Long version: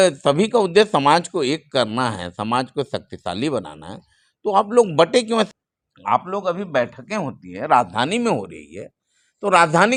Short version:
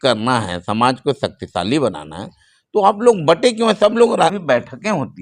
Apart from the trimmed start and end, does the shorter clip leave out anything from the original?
yes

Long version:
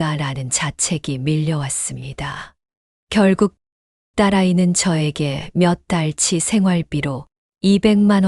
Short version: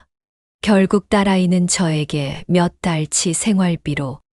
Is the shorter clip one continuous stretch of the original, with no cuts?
no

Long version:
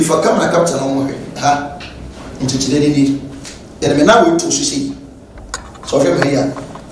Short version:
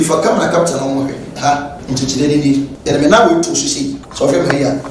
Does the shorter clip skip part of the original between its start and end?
yes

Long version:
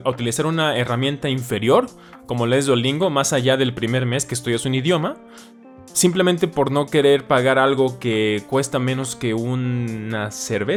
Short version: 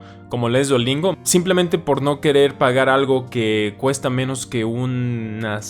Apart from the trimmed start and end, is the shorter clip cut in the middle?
yes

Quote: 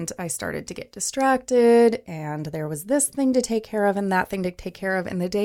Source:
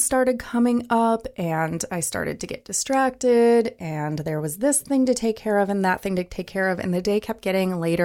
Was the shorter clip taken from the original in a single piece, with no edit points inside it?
yes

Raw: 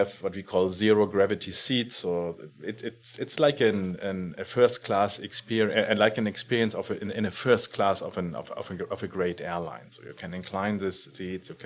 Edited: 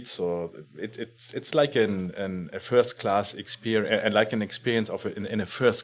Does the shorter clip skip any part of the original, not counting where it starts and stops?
no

